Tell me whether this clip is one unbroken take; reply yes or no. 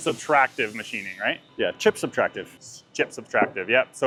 yes